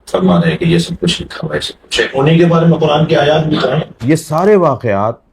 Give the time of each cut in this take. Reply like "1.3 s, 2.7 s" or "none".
3.9 s